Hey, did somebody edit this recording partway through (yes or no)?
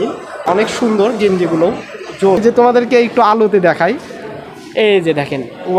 yes